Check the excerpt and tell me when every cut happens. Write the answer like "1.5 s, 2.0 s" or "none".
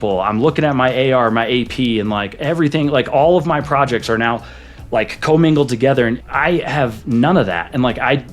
6.2 s